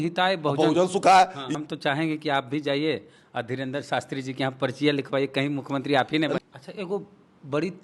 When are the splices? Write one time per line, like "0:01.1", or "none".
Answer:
0:01.4
0:06.4